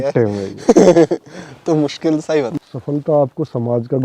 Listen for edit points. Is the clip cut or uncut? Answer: cut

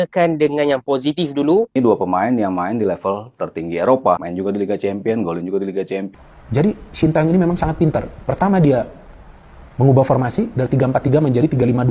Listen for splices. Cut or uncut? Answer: cut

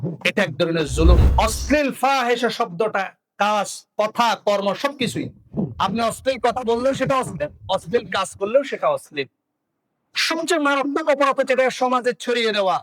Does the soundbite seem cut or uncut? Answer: cut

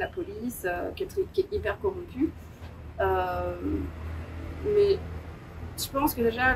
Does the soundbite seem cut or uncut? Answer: uncut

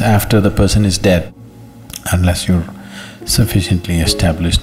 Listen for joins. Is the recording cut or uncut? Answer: cut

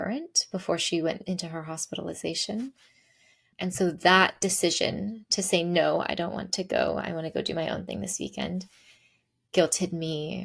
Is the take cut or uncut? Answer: uncut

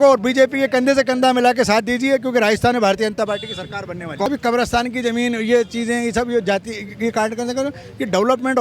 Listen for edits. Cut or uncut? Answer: cut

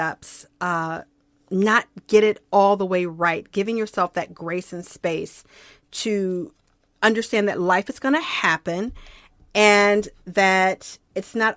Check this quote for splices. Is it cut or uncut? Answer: uncut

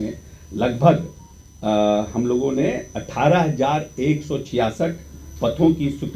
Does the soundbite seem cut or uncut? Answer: uncut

